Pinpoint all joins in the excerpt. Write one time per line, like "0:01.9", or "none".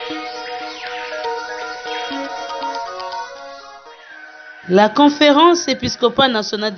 0:04.6